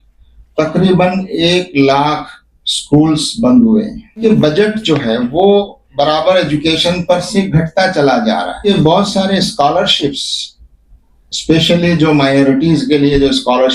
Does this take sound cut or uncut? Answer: cut